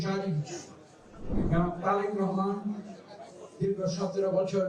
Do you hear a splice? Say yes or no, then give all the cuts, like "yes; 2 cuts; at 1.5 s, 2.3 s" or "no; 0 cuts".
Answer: yes; 1 cut; at 1.3 s